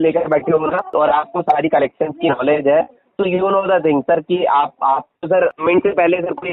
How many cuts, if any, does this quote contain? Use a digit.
2